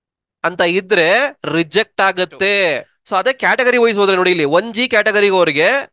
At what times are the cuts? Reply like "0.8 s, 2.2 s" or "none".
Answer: 2.9 s

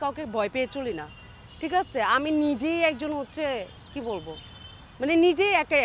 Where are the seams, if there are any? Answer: none

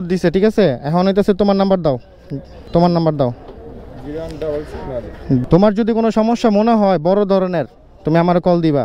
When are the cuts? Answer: 2.7 s, 5.4 s

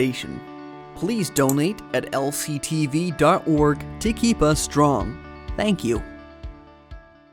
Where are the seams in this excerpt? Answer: 6.0 s

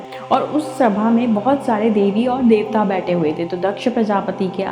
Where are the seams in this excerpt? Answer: none

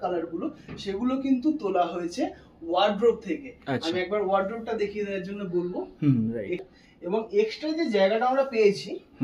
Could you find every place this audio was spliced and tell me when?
6.6 s

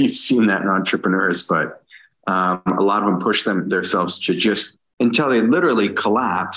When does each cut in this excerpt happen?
none

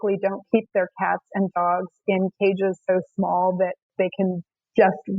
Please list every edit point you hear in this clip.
3.8 s

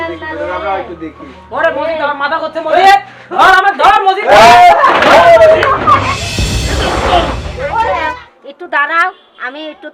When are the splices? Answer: 8.0 s

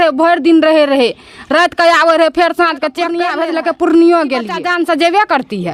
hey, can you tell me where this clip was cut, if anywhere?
3.2 s, 4.7 s

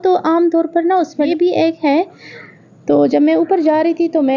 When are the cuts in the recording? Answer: 1.3 s

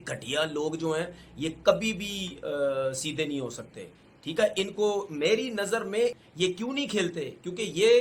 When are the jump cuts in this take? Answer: 6.2 s

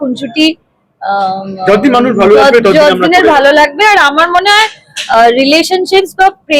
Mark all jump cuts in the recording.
none

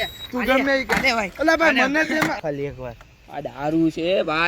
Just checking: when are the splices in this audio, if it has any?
2.4 s

